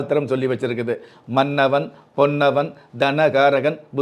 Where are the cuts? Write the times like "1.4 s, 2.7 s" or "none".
none